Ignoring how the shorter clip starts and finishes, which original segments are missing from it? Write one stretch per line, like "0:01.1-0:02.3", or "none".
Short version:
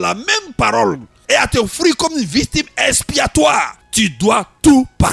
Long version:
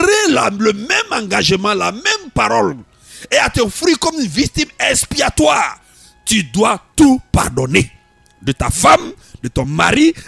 0:02.9-0:03.1
0:05.8-0:06.1